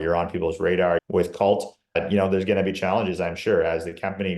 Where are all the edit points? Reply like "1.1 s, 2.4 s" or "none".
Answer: 1.0 s